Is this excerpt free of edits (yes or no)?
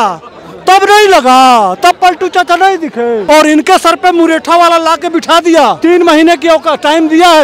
no